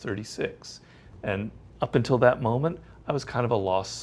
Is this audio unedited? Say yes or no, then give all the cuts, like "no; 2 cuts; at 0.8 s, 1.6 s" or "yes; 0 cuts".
yes; 0 cuts